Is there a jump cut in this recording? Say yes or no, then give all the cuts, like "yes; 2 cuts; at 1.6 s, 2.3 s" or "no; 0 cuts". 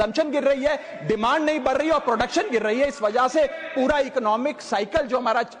no; 0 cuts